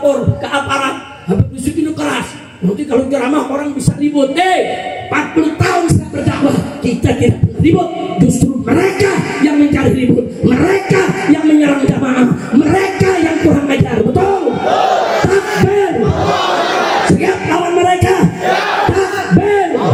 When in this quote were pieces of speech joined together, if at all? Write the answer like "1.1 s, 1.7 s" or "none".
none